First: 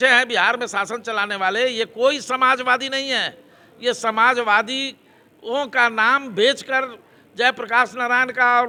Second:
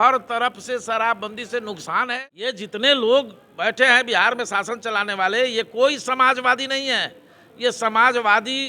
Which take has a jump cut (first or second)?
second